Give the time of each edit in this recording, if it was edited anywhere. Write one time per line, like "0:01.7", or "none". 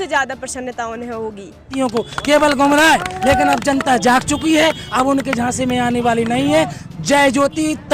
0:01.7